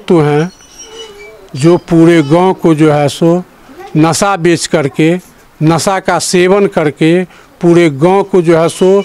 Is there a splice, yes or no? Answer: no